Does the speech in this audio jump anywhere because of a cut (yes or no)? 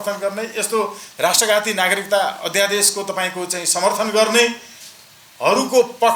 no